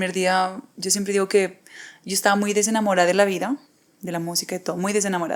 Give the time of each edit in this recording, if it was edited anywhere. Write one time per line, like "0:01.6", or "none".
none